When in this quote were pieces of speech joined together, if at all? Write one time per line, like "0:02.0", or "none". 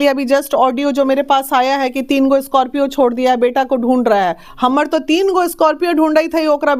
none